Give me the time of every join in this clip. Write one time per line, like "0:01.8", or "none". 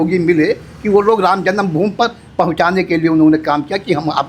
none